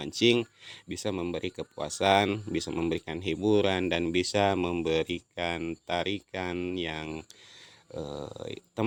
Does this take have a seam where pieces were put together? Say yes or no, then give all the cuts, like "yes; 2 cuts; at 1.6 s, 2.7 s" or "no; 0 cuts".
no; 0 cuts